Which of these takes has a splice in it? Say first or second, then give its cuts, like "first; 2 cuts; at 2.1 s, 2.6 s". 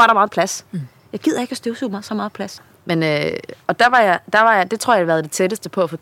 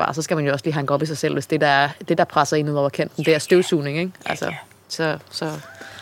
first; 1 cut; at 2.6 s